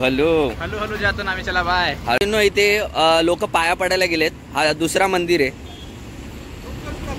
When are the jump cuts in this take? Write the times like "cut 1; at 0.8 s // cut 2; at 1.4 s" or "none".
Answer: cut 1; at 2.2 s